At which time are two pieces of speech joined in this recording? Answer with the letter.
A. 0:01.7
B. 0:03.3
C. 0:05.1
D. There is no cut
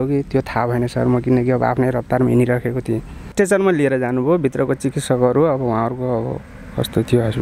B